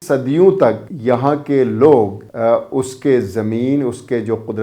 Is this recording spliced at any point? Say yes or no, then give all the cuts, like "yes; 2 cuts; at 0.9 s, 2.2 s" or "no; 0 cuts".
yes; 2 cuts; at 0.9 s, 2.2 s